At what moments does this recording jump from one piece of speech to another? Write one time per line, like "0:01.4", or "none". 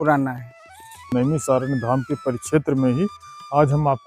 0:01.1